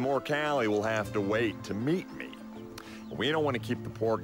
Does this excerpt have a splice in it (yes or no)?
no